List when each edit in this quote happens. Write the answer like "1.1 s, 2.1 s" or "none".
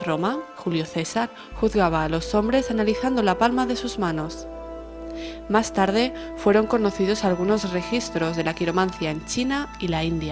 8.1 s